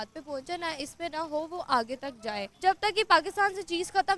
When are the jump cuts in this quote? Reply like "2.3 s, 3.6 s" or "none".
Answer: 2.5 s